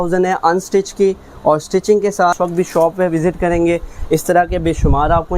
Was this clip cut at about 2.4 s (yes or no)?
yes